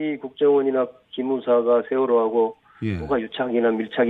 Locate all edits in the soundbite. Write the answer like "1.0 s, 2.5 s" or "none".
none